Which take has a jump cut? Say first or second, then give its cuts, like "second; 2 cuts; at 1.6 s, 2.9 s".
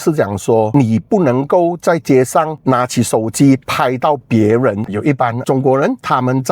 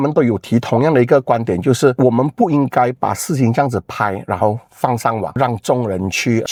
first; 1 cut; at 4.9 s